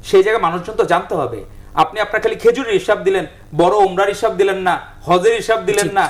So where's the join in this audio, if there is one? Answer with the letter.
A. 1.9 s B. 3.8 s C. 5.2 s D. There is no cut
D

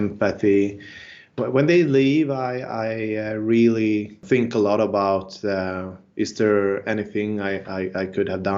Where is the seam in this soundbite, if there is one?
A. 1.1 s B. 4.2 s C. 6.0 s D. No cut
B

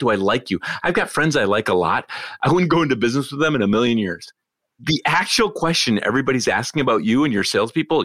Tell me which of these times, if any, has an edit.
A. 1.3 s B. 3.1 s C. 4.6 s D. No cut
C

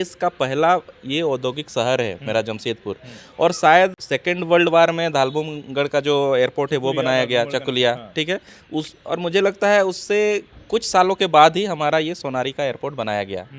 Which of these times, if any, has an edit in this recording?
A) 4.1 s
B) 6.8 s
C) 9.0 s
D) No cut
A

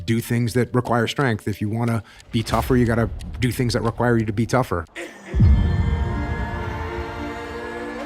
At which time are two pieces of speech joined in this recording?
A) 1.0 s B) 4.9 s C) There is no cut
B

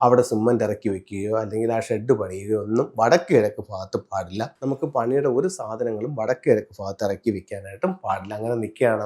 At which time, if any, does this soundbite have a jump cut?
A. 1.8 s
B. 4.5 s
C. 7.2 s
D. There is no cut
B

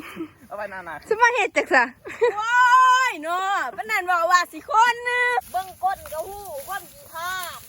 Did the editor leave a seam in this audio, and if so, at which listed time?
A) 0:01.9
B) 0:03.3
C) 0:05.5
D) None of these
C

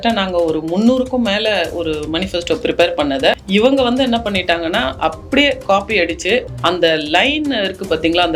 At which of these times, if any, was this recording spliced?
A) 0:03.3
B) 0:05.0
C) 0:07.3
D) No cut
D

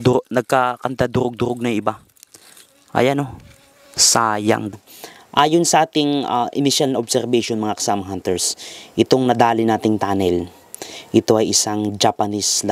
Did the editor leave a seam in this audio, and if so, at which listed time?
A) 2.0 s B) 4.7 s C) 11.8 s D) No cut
B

